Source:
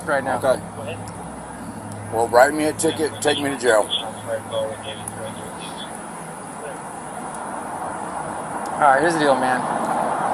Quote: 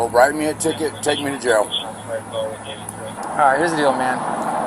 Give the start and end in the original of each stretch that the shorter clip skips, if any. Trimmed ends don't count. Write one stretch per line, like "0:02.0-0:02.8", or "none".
0:05.4-0:08.6